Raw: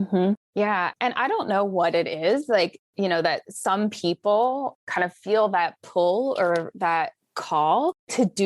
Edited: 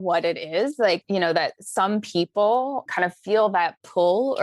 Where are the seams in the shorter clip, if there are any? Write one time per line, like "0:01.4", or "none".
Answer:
0:01.0
0:02.9